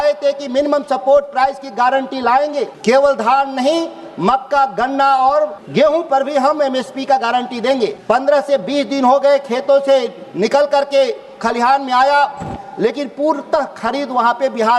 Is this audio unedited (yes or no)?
no